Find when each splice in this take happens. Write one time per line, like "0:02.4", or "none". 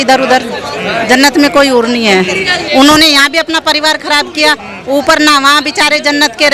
0:02.6